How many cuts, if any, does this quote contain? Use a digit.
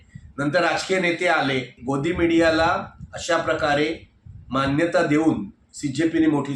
1